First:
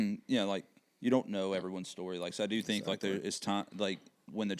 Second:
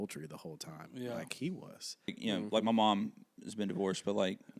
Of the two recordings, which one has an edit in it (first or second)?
second